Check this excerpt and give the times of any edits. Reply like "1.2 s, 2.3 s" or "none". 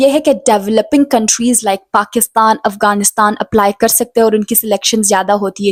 none